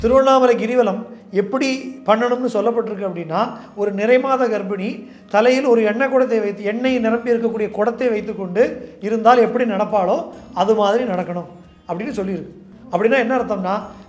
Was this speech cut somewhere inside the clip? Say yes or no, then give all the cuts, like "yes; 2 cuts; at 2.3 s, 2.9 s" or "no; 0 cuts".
no; 0 cuts